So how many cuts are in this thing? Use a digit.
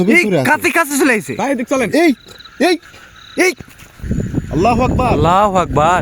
1